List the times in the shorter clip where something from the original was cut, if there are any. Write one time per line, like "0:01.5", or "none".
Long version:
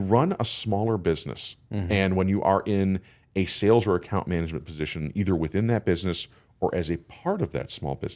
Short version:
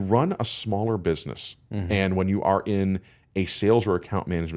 none